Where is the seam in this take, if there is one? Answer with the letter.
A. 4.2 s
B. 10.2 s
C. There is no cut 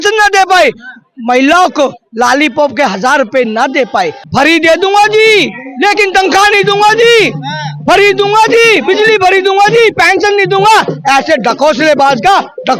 A